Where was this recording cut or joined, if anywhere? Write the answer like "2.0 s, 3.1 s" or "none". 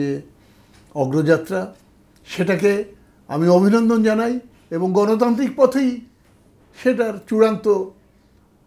none